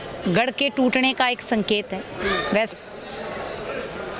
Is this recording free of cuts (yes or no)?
no